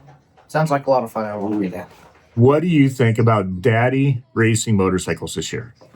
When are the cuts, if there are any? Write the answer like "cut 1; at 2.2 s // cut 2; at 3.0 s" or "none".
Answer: cut 1; at 1.7 s